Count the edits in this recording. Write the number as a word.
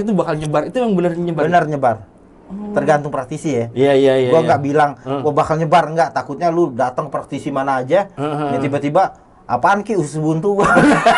zero